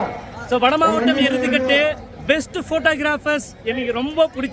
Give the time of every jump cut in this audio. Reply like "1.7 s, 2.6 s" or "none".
none